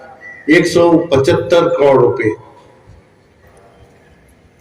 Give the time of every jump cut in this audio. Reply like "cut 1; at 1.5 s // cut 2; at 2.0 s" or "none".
cut 1; at 3.5 s